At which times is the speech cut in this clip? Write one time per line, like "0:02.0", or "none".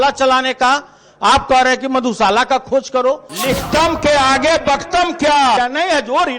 0:03.3
0:05.6